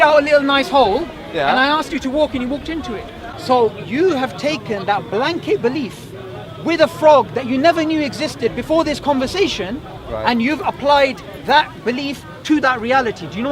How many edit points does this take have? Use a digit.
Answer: 1